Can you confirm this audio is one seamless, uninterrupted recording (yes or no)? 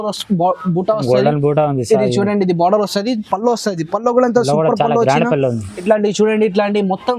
no